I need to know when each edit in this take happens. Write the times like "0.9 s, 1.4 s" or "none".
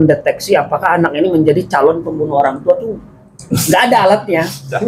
none